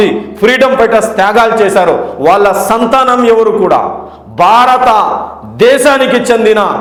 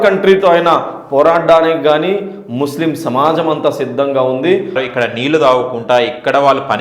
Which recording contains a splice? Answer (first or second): second